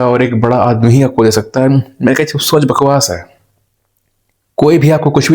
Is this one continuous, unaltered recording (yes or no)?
yes